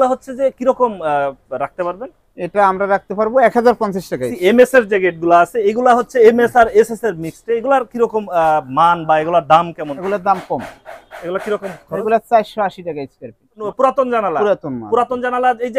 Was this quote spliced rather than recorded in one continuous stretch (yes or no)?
yes